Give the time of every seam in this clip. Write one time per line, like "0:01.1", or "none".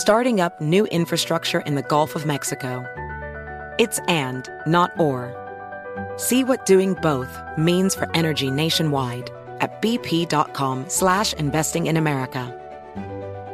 0:10.9
0:12.5